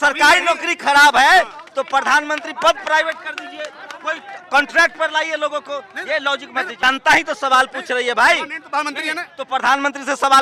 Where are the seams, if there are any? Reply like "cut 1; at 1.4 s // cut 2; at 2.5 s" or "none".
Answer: cut 1; at 6.8 s